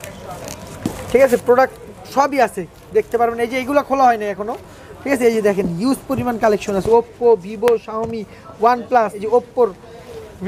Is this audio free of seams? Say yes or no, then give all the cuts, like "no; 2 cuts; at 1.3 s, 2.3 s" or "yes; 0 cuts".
no; 1 cut; at 9.2 s